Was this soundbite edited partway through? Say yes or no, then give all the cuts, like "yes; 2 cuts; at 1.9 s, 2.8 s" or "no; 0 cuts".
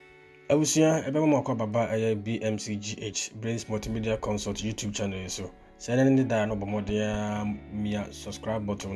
no; 0 cuts